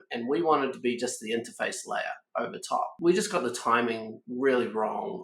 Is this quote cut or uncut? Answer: cut